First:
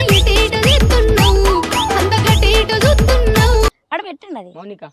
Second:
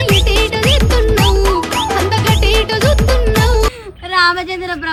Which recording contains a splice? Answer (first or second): first